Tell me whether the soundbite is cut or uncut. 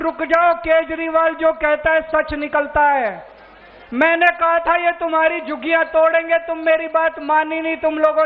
uncut